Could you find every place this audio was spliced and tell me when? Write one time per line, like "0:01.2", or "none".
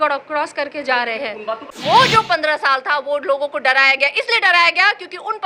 0:01.7